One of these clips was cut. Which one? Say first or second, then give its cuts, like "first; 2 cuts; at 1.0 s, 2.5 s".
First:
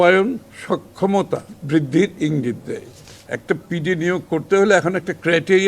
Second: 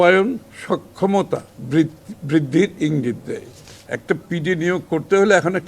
first; 1 cut; at 1.5 s